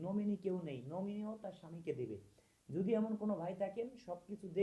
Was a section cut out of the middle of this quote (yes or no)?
no